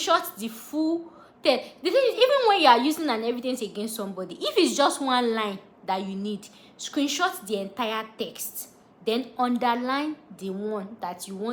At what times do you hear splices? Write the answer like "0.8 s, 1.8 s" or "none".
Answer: none